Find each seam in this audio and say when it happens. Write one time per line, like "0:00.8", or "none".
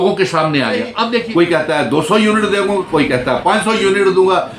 0:01.2